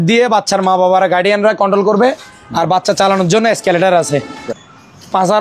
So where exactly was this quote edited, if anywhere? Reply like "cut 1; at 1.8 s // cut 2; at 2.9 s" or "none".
cut 1; at 4.3 s